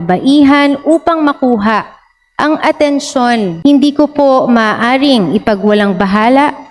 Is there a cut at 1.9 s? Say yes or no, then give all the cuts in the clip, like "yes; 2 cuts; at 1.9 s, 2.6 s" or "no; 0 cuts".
no; 1 cut; at 3.5 s